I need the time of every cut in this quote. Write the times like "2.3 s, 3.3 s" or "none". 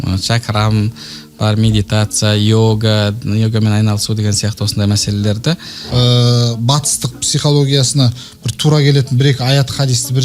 5.8 s